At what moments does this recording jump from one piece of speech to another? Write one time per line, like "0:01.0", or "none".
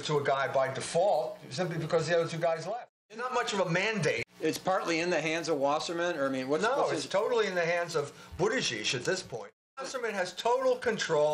0:03.1
0:04.3
0:09.7